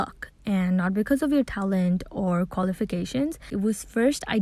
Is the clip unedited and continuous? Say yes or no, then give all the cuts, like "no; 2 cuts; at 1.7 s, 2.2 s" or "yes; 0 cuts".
no; 1 cut; at 3.5 s